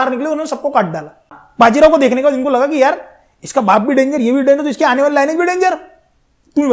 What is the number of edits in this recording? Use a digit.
1